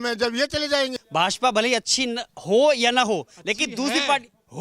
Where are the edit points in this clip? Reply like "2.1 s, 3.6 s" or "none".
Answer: none